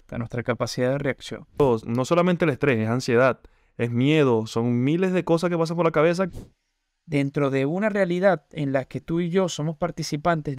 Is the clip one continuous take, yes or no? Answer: no